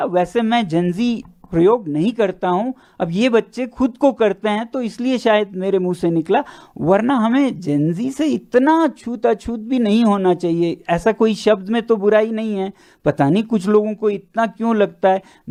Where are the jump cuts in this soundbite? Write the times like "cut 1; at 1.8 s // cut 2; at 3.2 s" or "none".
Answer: none